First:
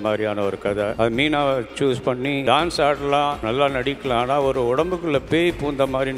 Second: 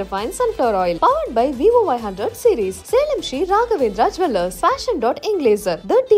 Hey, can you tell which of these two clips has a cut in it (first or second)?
first